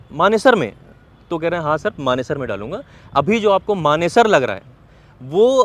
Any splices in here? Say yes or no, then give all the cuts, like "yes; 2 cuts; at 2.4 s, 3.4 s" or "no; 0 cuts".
no; 0 cuts